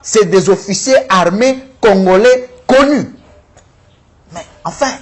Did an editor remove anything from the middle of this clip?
no; 0 cuts

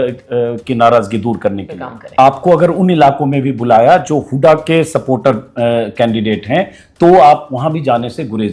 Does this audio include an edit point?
yes; 1 cut; at 1.9 s

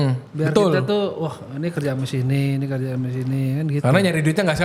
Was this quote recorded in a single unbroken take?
yes; 0 cuts

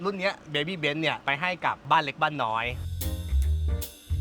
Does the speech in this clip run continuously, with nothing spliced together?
no; 2 cuts; at 1.7 s, 2.8 s

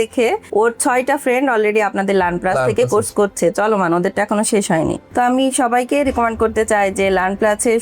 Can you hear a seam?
yes; 1 cut; at 5.0 s

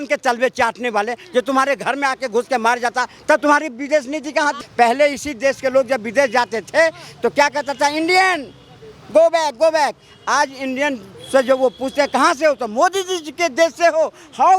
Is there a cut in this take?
yes; 1 cut; at 4.6 s

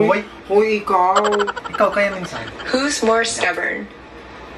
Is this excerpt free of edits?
yes; 0 cuts

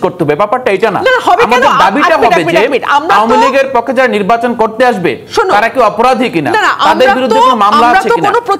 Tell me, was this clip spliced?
no; 0 cuts

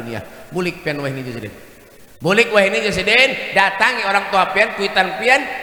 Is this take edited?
no; 0 cuts

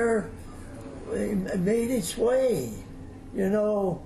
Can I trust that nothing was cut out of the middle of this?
yes; 0 cuts

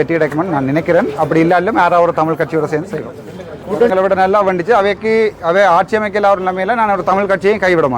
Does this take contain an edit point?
yes; 1 cut; at 3.9 s

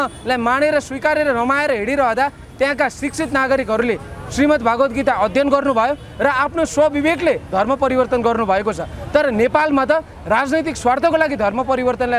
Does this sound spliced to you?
no; 0 cuts

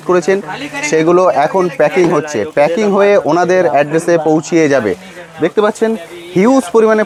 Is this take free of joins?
yes; 0 cuts

